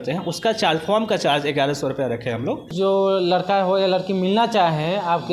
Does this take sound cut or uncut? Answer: cut